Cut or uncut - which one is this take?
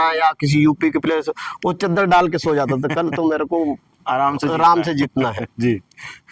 uncut